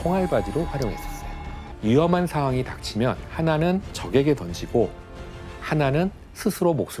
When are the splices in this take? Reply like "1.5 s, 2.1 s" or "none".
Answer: 1.6 s